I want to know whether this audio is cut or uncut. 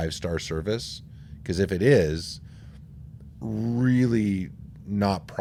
uncut